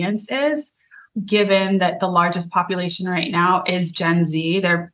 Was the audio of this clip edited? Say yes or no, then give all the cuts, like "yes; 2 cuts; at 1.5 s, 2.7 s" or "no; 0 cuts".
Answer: yes; 1 cut; at 1.1 s